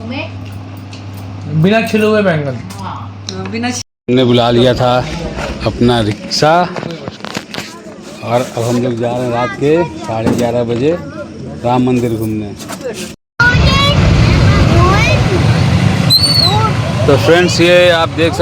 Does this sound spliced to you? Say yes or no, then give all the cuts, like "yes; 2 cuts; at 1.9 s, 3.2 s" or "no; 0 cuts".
yes; 2 cuts; at 3.8 s, 13.3 s